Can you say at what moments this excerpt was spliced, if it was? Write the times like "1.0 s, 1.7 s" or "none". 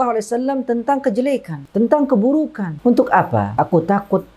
1.6 s, 2.7 s, 3.5 s